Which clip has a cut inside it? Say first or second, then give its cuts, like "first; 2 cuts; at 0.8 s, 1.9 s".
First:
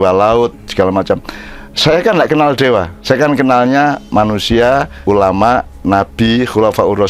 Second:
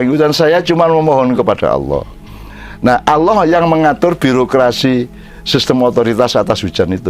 first; 2 cuts; at 2.9 s, 4.9 s